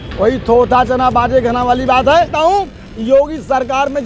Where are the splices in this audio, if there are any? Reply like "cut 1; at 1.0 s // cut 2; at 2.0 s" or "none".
cut 1; at 2.3 s